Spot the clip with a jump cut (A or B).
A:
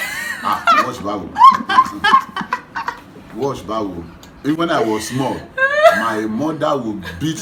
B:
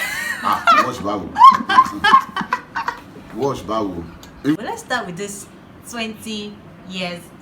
B